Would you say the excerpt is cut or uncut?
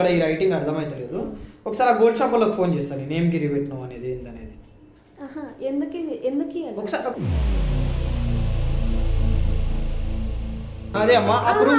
cut